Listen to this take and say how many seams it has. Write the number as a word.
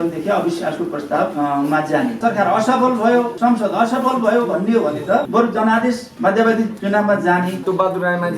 seven